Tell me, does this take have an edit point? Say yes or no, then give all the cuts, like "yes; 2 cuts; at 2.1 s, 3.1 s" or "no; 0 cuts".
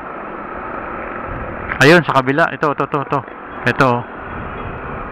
no; 0 cuts